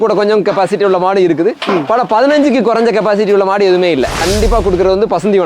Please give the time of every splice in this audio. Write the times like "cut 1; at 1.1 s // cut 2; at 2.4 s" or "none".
cut 1; at 4.2 s